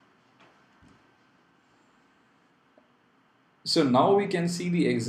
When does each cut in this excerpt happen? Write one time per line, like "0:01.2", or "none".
none